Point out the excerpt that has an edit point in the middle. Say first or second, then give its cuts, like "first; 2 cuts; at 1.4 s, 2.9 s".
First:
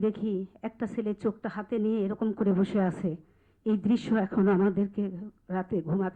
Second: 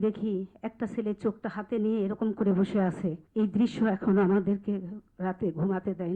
second; 1 cut; at 3.2 s